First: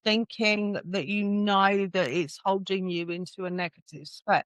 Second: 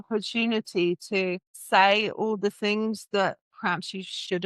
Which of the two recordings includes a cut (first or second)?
second